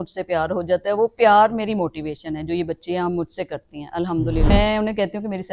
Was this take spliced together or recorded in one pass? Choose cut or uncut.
cut